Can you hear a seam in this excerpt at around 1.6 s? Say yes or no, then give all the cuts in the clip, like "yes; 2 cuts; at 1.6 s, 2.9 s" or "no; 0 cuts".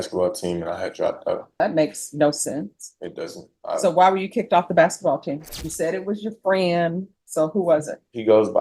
yes; 2 cuts; at 1.6 s, 5.4 s